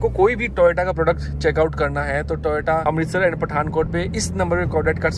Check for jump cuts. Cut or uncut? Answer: uncut